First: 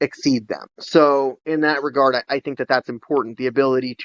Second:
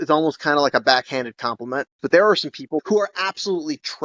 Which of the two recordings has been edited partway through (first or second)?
second